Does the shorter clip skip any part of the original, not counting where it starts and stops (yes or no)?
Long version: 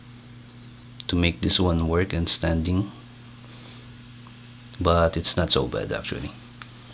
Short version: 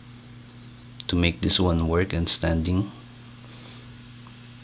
no